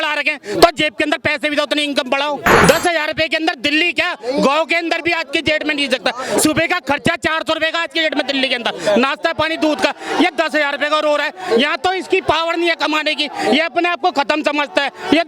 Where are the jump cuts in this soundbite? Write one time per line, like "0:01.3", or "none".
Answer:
0:02.6